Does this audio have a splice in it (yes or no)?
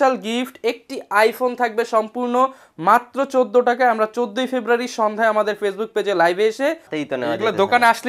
yes